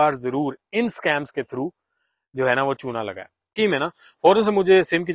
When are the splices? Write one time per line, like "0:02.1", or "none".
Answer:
0:03.5